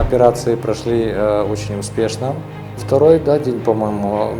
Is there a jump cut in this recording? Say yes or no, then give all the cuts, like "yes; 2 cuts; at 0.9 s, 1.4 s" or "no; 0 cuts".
yes; 1 cut; at 2.6 s